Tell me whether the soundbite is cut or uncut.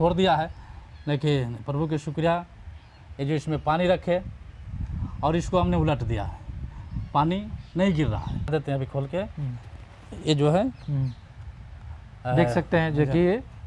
cut